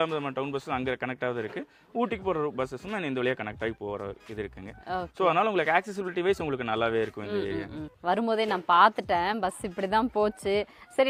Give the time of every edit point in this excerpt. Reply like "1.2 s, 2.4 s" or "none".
none